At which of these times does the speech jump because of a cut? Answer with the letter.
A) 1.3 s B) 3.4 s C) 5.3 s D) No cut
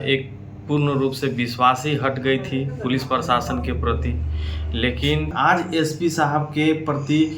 C